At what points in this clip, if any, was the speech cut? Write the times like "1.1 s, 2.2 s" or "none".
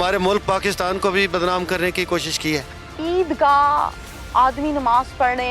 2.8 s